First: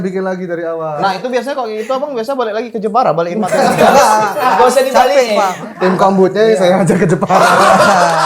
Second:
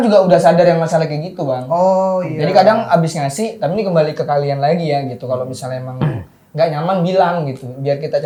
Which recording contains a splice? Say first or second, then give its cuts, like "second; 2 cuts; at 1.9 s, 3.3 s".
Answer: first; 2 cuts; at 1.0 s, 5.6 s